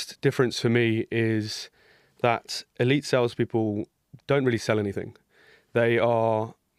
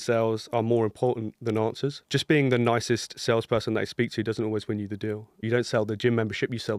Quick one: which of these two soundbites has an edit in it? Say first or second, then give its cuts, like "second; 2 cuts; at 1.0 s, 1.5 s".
second; 2 cuts; at 2.0 s, 5.4 s